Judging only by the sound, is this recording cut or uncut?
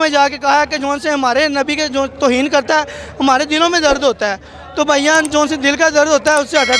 uncut